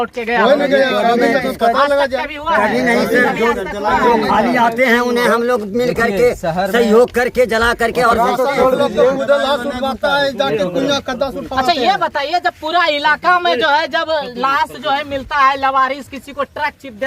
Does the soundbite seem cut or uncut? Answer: uncut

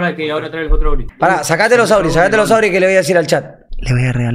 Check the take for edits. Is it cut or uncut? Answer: cut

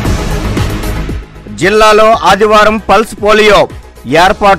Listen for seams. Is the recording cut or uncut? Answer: uncut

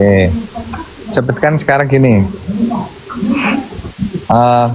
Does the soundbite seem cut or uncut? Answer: cut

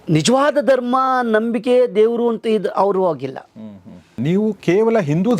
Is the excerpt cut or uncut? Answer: cut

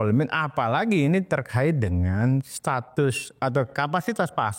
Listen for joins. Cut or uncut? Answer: uncut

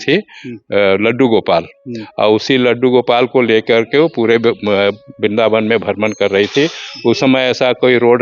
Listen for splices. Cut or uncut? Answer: uncut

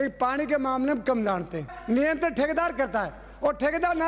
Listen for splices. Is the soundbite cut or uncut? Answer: cut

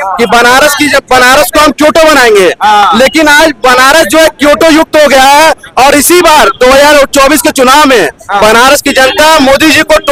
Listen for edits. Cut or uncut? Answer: uncut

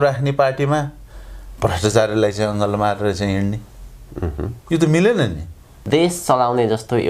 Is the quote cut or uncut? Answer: cut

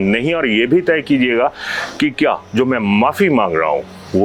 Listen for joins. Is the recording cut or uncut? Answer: uncut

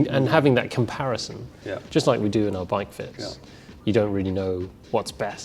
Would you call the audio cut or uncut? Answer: uncut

